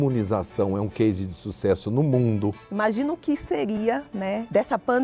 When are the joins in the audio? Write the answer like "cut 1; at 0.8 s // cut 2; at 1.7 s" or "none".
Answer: cut 1; at 2.6 s // cut 2; at 3.8 s